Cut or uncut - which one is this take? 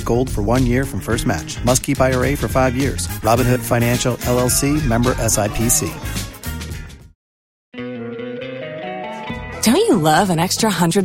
cut